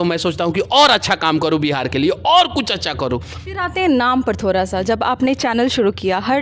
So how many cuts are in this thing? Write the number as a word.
one